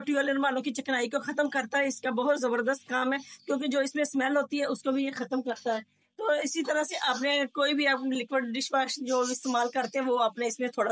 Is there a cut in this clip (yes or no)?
no